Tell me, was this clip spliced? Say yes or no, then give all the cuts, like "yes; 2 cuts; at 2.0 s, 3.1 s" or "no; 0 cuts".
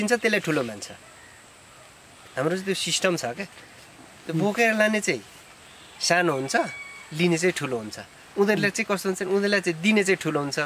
no; 0 cuts